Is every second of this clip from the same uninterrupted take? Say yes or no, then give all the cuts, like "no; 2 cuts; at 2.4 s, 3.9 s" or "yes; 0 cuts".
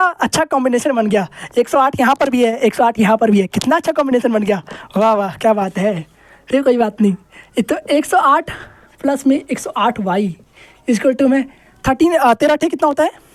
yes; 0 cuts